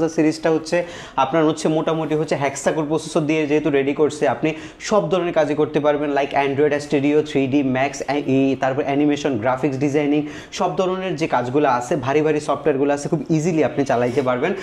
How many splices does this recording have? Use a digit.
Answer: 0